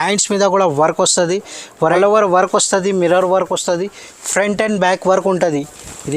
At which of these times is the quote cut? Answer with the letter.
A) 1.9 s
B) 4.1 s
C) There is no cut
A